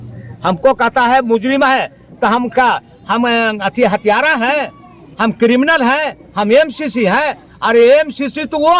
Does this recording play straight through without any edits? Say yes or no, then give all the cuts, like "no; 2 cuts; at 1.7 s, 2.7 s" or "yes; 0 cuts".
yes; 0 cuts